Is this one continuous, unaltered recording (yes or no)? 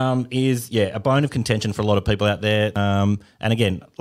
no